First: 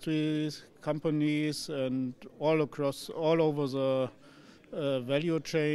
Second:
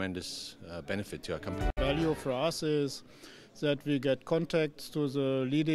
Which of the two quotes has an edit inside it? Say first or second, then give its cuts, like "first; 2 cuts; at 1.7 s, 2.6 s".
second; 1 cut; at 1.7 s